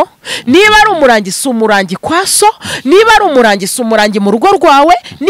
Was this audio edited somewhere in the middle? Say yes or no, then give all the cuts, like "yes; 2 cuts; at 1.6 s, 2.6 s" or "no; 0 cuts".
no; 0 cuts